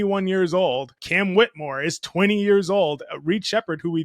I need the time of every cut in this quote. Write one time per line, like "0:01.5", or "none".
0:01.0